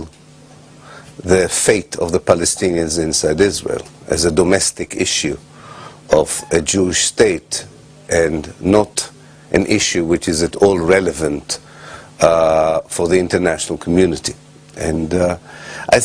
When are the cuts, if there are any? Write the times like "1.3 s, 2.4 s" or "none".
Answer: 9.7 s